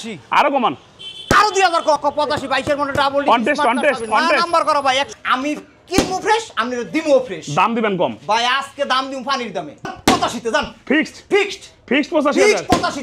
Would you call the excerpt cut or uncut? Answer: cut